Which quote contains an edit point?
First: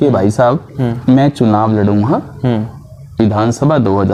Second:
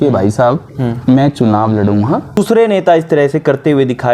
second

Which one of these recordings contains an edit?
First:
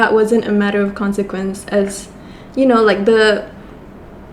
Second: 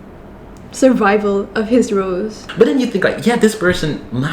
second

